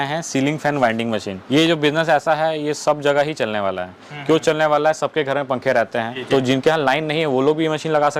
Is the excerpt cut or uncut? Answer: cut